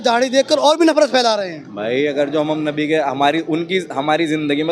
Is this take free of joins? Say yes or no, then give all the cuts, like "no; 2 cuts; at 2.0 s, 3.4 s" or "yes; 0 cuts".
yes; 0 cuts